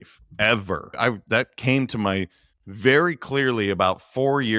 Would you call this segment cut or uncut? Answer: uncut